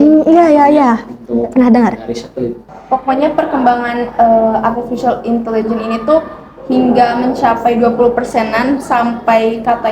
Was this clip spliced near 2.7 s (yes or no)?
yes